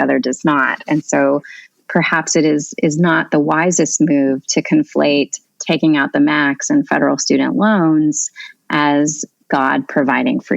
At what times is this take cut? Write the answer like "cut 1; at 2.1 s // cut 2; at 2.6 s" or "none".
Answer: cut 1; at 9.3 s